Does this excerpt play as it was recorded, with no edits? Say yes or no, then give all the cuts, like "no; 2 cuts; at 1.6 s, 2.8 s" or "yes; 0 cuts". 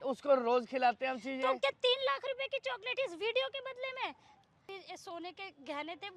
no; 1 cut; at 4.7 s